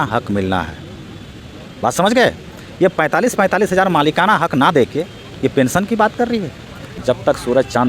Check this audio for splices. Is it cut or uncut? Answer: cut